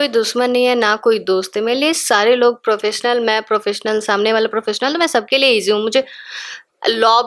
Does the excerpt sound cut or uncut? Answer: uncut